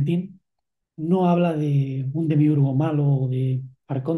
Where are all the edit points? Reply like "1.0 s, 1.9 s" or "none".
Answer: none